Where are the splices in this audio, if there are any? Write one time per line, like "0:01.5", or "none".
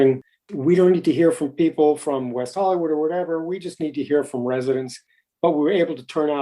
0:05.2